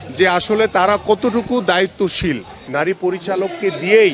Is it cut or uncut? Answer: cut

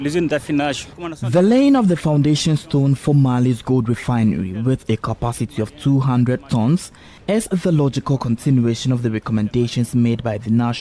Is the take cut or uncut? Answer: cut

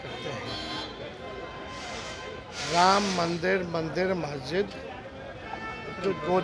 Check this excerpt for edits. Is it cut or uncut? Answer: uncut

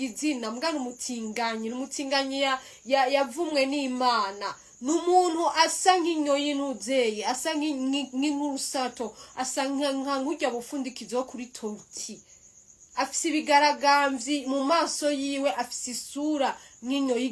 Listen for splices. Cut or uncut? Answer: uncut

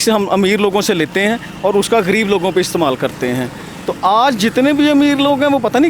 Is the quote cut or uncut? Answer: uncut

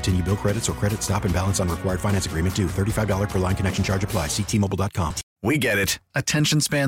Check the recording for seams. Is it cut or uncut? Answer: cut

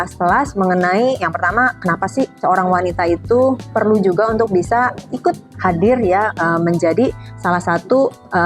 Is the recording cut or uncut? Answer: uncut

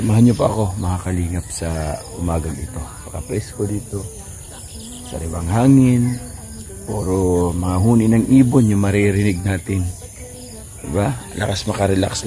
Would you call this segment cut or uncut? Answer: uncut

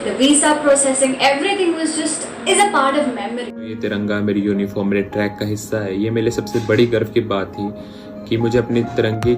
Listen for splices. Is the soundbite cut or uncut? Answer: cut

